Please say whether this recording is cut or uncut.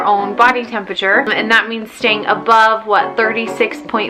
uncut